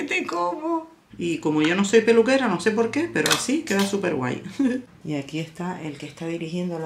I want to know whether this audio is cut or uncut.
cut